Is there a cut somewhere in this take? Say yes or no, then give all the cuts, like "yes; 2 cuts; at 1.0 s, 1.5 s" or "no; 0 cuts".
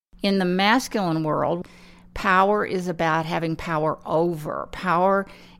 yes; 1 cut; at 1.6 s